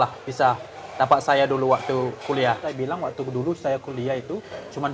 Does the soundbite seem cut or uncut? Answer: cut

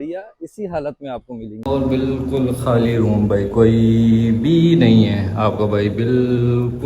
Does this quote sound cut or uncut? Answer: cut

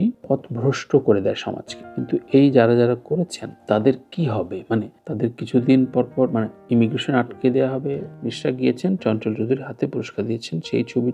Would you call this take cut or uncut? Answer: cut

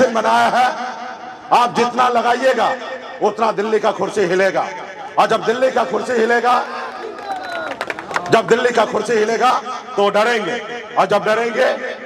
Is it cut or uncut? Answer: uncut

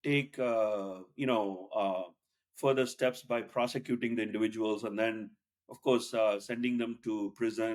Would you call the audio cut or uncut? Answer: uncut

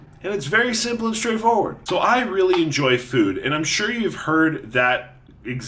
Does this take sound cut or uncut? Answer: cut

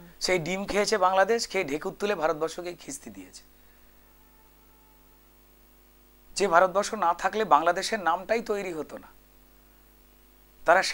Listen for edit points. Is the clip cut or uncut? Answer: uncut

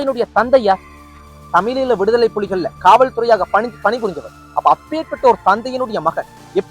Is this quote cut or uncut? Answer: uncut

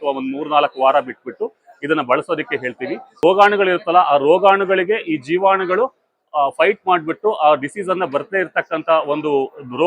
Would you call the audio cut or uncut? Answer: cut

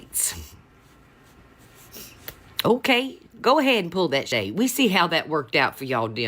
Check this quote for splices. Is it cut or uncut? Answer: cut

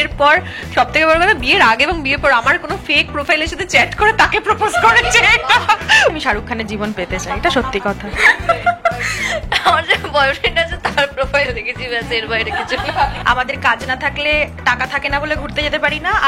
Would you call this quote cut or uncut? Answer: cut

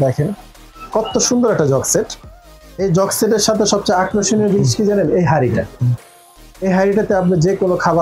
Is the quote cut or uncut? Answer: uncut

